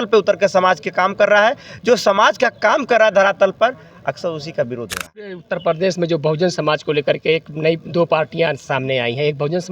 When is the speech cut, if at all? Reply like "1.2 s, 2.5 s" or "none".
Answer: 5.4 s